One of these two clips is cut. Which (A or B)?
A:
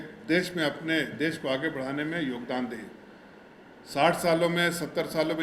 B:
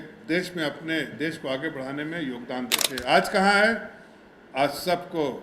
B